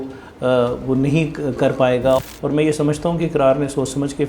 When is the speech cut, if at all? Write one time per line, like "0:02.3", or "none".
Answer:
0:02.3